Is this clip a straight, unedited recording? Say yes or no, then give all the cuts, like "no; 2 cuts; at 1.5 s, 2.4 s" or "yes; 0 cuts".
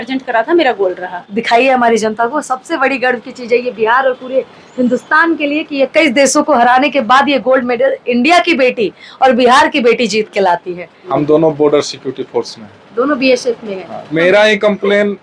no; 3 cuts; at 1.4 s, 11.1 s, 14.1 s